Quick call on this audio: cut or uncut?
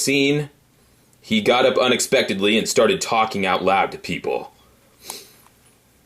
cut